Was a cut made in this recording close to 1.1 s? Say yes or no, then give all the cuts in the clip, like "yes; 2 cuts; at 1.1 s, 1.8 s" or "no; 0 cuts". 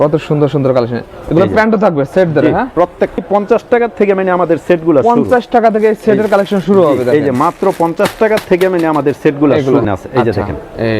no; 2 cuts; at 3.2 s, 9.9 s